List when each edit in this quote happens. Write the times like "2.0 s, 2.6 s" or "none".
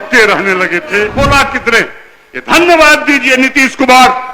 1.1 s